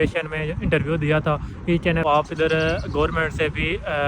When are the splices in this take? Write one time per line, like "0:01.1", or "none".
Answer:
0:02.0